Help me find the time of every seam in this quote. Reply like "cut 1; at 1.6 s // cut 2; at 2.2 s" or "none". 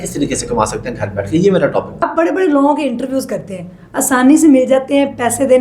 cut 1; at 2.0 s